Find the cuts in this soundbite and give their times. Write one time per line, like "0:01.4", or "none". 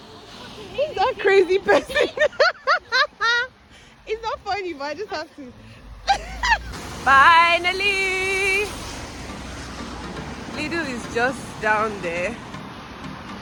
none

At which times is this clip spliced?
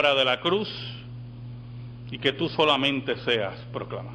0:02.3

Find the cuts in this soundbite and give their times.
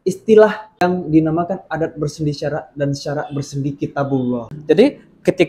0:00.8
0:04.5

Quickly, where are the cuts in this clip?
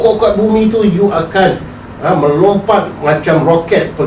none

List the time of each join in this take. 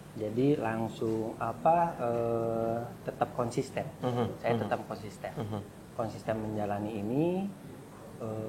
none

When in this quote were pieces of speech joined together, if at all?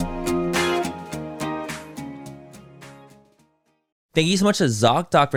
none

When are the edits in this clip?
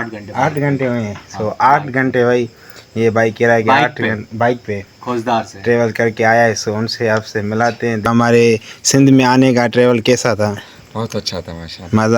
0:08.1

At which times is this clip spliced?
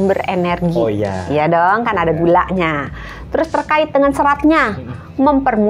none

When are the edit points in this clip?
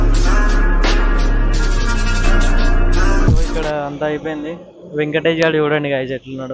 0:03.7

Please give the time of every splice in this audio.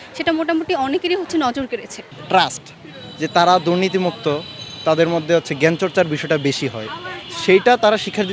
0:02.1

